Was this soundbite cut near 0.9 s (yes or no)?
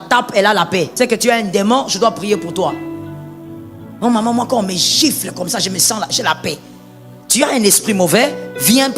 yes